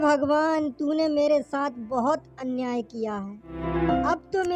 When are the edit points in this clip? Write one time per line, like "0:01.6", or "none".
none